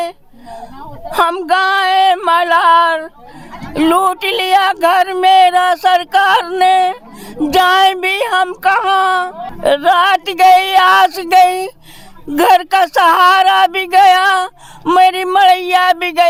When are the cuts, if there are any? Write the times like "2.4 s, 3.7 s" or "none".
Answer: none